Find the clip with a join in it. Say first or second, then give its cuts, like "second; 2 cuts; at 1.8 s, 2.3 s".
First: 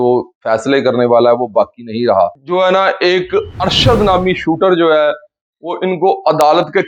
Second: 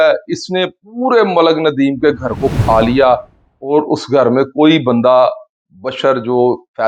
first; 1 cut; at 2.3 s